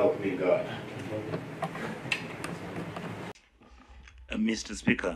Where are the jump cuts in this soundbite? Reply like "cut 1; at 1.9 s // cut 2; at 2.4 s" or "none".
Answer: cut 1; at 3.3 s